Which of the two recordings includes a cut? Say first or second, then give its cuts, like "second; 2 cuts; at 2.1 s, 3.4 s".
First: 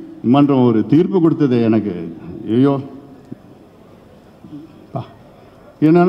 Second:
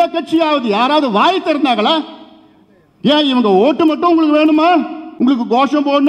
second; 1 cut; at 5.0 s